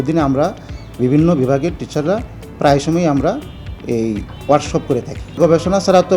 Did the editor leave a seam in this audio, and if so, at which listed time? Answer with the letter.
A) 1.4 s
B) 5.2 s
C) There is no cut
B